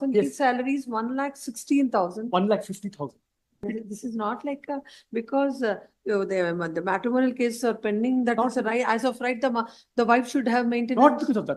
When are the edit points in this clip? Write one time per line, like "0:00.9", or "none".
0:03.6